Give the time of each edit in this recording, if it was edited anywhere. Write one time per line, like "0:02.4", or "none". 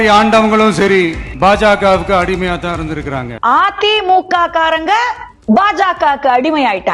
none